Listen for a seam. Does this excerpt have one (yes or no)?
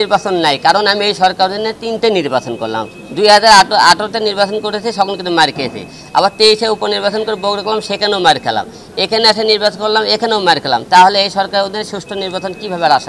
no